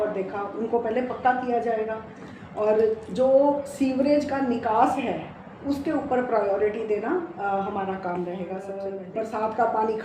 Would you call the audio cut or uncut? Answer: cut